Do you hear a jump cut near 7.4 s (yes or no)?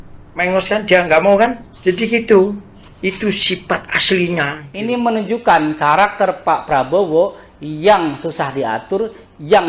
no